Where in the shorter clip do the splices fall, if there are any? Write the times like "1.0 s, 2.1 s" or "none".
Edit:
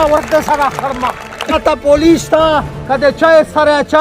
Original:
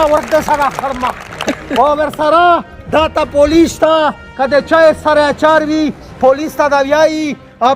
1.5 s